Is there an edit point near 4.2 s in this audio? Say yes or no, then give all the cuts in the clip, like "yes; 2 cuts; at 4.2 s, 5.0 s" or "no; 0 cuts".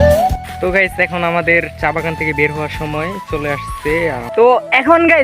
yes; 1 cut; at 4.2 s